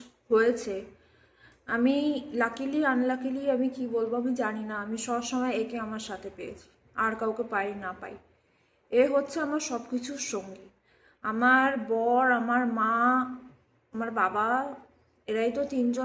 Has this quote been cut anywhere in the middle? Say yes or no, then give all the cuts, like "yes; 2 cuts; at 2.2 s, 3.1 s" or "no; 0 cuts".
no; 0 cuts